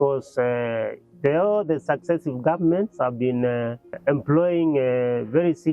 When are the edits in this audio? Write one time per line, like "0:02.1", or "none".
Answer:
0:03.9